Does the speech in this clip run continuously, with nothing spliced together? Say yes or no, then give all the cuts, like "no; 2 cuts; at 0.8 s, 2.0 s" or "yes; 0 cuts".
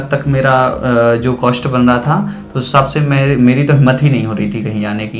yes; 0 cuts